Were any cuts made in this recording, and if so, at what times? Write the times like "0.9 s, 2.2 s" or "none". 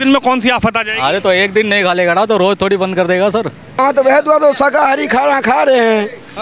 3.7 s